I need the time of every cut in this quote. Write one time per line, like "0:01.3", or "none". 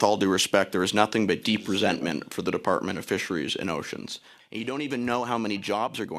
0:04.3